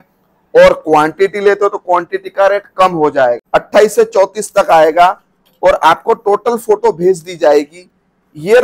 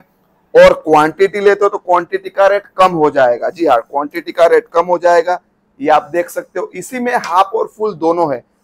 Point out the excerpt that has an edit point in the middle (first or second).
first